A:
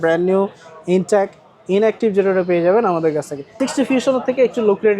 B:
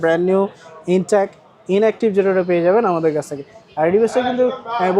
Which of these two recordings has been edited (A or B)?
A